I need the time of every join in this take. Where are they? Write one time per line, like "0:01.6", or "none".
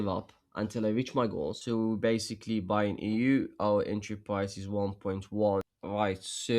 0:01.6
0:05.6